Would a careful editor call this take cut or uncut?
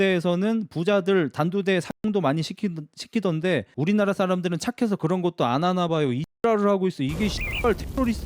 uncut